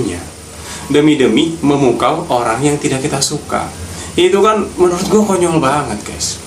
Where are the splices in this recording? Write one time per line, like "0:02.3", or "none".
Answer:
none